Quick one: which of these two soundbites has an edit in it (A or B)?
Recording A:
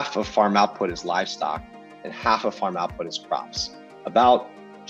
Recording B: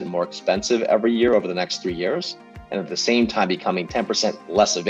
B